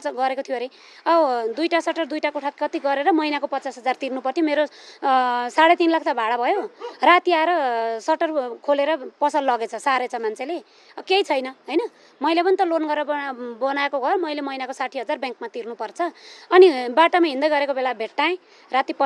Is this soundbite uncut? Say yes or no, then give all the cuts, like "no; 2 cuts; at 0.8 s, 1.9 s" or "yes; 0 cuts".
yes; 0 cuts